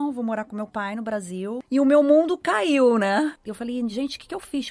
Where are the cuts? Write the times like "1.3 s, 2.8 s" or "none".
1.6 s, 3.4 s

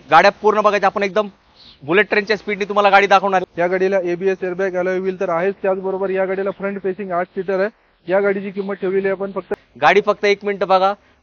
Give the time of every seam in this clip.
3.5 s, 9.5 s

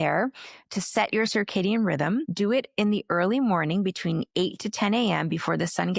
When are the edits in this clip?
2.3 s

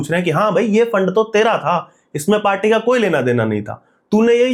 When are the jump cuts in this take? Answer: none

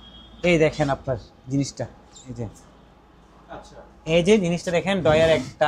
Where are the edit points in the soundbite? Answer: none

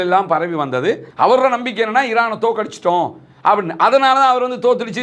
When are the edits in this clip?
1.1 s

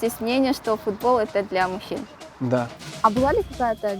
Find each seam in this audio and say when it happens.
2.8 s

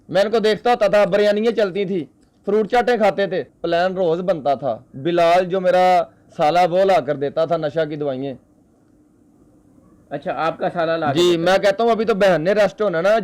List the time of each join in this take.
3.5 s

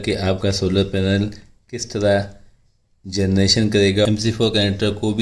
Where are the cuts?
4.1 s

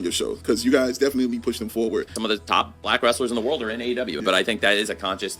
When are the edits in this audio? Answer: 2.2 s, 4.2 s

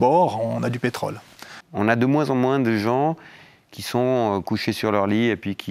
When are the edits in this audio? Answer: 1.6 s

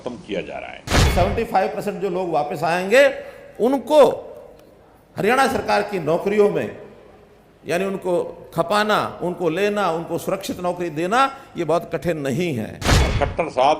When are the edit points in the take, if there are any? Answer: 1.0 s, 12.9 s

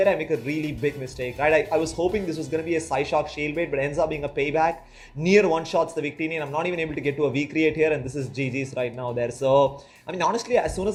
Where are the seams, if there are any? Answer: none

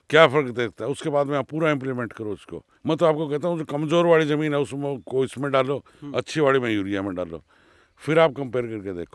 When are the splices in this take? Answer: 2.6 s

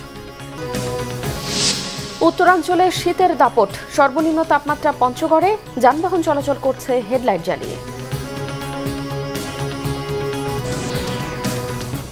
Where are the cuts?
10.9 s

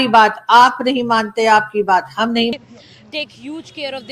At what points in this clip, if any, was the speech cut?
2.5 s

